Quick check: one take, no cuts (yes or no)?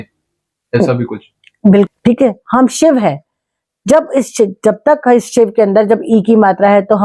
no